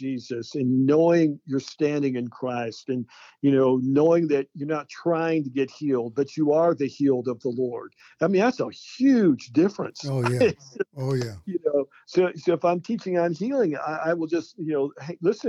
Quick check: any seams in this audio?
no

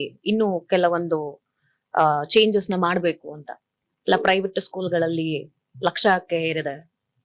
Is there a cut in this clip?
yes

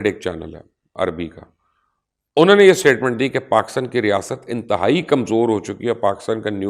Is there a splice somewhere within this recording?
no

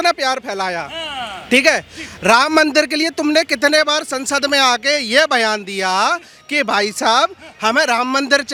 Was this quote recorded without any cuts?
yes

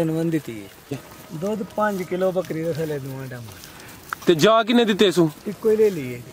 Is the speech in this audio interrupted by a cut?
yes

